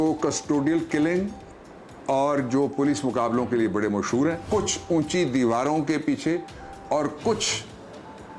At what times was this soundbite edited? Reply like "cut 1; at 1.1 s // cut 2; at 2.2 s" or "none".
cut 1; at 4.4 s